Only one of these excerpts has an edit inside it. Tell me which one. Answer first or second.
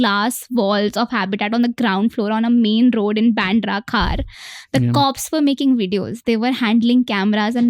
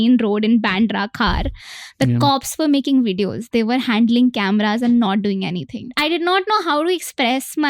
second